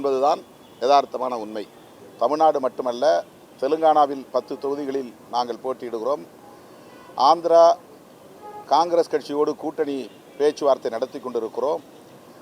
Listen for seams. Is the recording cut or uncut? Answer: cut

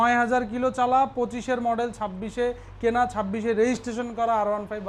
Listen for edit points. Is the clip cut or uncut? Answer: uncut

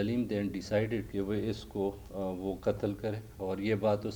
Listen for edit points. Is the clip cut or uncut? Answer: cut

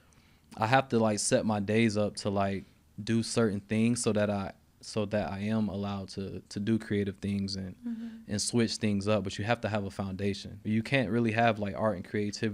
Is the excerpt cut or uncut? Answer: cut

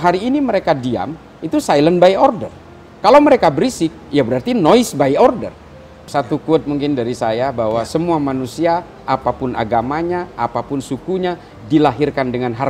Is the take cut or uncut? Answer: cut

